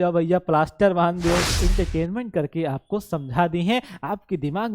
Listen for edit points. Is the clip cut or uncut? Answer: cut